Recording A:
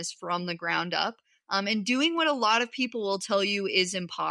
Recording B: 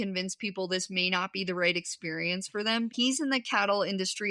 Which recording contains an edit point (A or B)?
B